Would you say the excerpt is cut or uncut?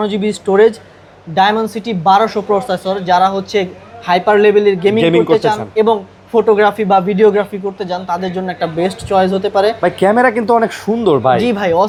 uncut